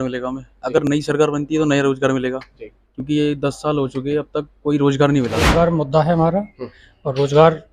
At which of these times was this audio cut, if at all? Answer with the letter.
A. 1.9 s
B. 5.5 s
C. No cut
B